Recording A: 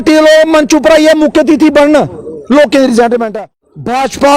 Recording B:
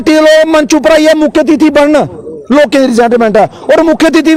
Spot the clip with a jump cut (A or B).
A